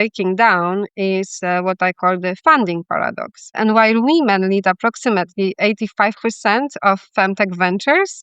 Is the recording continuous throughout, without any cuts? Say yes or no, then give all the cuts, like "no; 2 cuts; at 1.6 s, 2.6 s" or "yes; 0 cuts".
no; 1 cut; at 3.5 s